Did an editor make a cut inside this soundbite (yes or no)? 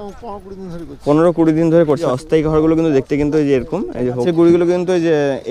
yes